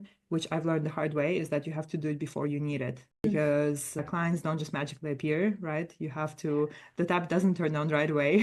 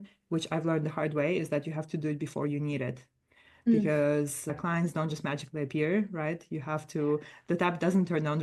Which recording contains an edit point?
first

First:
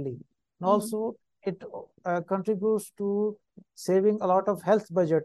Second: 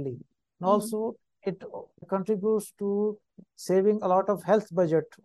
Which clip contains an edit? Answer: second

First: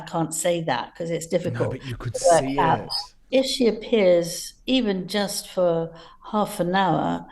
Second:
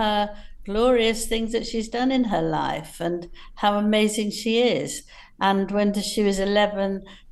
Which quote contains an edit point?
first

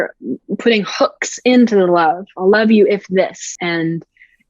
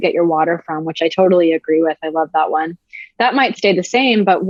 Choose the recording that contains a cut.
first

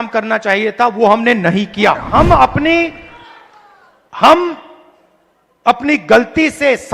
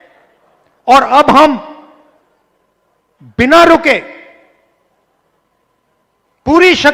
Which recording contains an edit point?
first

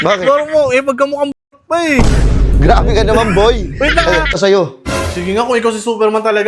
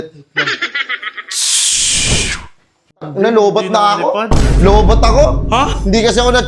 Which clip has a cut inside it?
first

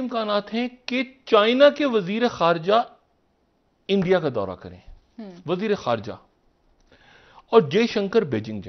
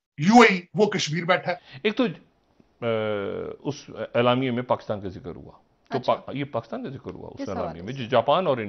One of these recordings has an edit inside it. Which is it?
second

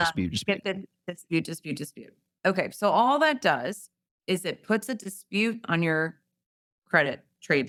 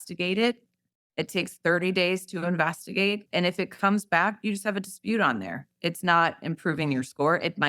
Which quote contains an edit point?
second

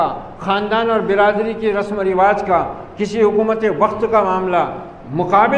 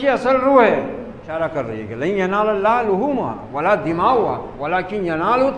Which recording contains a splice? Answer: second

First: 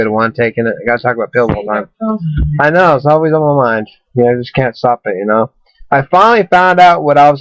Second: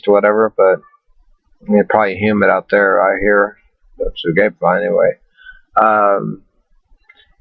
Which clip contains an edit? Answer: second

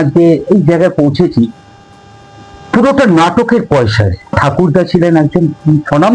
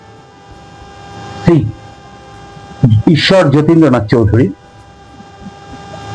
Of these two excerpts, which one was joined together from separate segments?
first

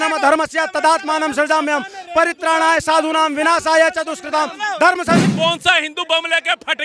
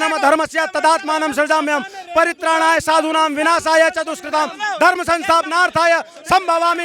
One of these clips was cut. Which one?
first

